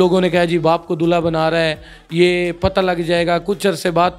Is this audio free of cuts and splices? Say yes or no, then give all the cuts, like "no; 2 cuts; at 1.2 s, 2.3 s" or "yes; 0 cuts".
yes; 0 cuts